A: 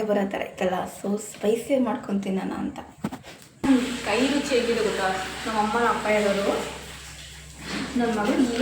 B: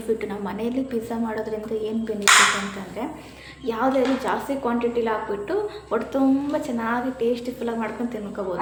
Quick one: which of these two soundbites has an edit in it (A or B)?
A